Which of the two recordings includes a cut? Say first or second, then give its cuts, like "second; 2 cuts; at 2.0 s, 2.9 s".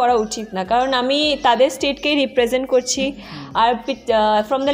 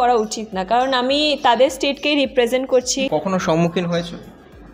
second; 1 cut; at 3.0 s